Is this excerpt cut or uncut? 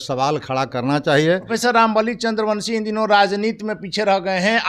cut